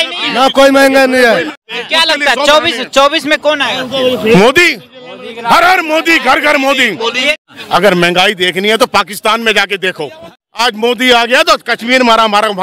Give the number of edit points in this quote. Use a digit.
3